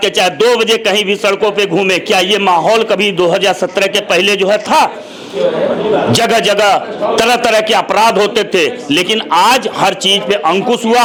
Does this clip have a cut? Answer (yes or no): no